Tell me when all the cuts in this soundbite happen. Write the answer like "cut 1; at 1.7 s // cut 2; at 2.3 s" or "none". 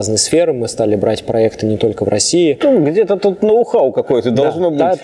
cut 1; at 2.6 s